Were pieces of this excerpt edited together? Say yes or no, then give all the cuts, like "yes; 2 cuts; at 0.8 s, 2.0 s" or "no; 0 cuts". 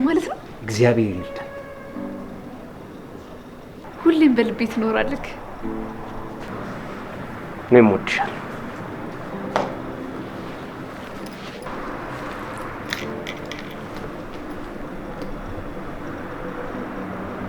no; 0 cuts